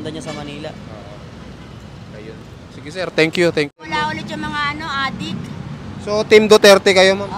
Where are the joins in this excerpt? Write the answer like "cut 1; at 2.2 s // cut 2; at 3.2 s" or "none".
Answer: cut 1; at 3.8 s